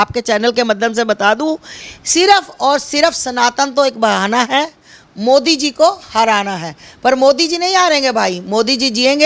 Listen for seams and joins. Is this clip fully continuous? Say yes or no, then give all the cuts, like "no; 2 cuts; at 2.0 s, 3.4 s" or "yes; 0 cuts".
yes; 0 cuts